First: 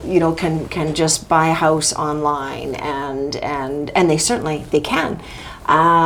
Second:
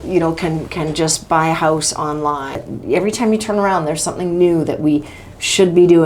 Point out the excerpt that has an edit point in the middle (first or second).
second